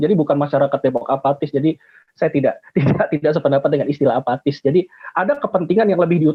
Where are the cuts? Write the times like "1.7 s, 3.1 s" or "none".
none